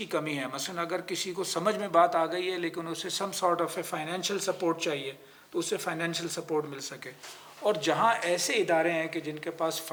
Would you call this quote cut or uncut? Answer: uncut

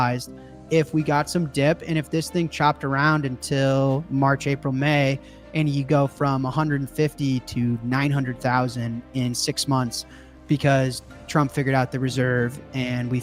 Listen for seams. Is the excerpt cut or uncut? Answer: uncut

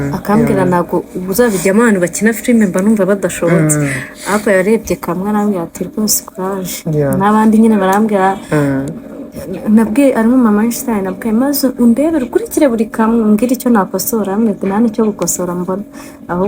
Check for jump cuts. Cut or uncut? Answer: uncut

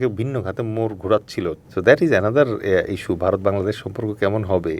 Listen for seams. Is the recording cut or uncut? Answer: cut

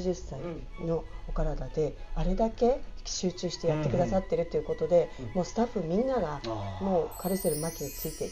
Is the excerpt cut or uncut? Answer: uncut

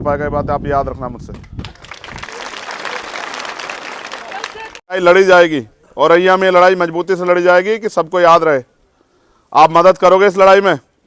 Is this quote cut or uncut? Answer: cut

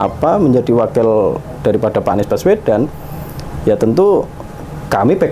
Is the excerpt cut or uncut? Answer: uncut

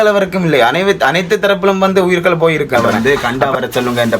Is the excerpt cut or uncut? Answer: cut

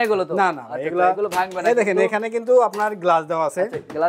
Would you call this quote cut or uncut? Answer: uncut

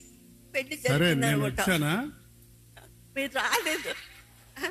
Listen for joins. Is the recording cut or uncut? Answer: uncut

